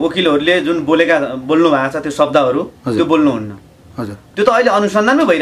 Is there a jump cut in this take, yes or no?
no